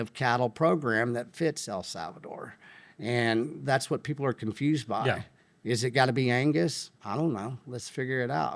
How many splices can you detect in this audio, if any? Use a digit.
0